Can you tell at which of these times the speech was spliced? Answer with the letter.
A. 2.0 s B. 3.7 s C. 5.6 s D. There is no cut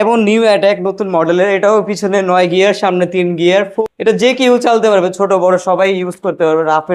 B